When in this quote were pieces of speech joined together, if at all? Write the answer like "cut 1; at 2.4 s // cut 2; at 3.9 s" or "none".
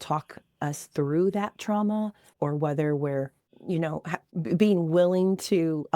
cut 1; at 2.2 s // cut 2; at 3.5 s // cut 3; at 4.2 s